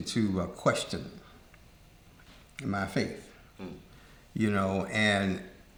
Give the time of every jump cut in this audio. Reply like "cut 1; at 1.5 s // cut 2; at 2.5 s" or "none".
none